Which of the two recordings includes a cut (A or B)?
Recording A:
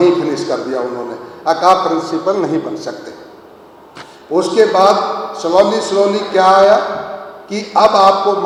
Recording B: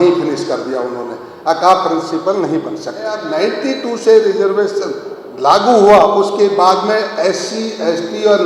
B